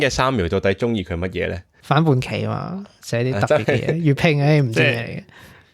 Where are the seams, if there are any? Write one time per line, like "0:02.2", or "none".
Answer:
0:01.7